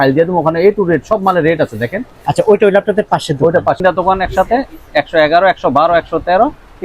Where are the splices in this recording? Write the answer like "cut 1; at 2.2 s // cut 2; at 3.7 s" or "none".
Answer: cut 1; at 3.8 s